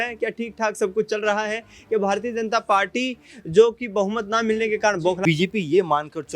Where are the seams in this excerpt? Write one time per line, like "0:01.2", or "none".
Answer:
0:05.2